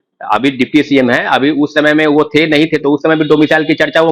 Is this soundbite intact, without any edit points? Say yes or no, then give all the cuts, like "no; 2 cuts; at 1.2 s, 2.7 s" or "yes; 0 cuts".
yes; 0 cuts